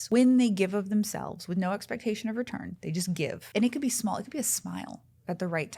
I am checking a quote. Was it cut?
yes; 1 cut; at 3.4 s

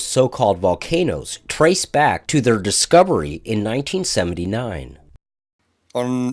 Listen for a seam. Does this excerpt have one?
yes; 1 cut; at 1.4 s

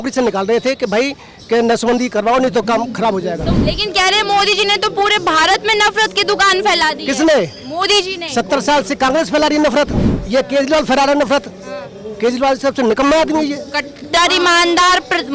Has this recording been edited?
yes; 1 cut; at 3.5 s

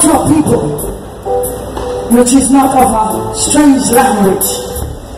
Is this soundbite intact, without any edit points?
yes; 0 cuts

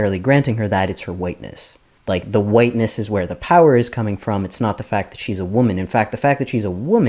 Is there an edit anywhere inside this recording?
no; 0 cuts

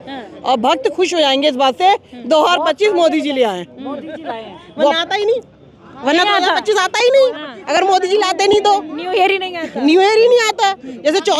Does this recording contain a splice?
no; 0 cuts

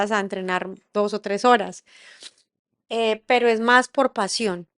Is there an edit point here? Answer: no; 0 cuts

